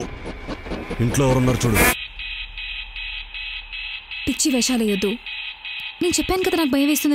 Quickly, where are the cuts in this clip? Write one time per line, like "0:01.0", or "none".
0:01.9